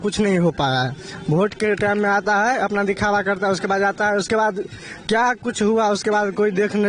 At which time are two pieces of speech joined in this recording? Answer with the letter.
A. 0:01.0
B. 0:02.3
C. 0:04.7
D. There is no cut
D